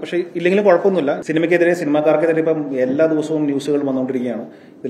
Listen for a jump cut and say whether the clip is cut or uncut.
cut